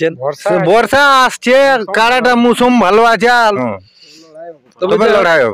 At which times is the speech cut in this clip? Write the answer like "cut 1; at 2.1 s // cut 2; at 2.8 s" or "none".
cut 1; at 3.5 s